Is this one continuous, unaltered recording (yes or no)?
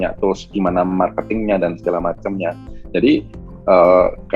yes